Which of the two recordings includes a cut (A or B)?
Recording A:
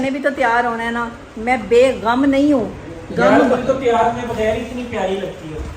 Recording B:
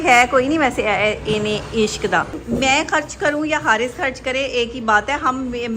B